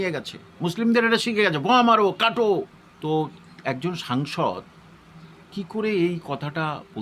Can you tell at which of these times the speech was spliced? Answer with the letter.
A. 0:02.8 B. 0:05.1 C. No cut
A